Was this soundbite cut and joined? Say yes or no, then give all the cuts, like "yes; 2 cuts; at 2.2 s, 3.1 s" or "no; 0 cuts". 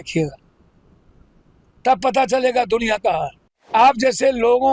yes; 1 cut; at 3.7 s